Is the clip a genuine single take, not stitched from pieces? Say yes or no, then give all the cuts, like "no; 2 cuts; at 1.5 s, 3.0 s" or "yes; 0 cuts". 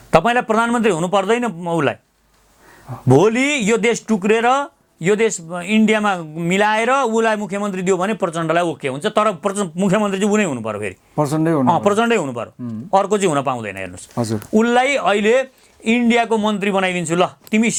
yes; 0 cuts